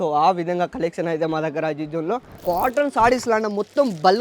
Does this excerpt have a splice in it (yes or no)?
yes